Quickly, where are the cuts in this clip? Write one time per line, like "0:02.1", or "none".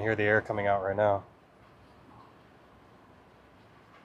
none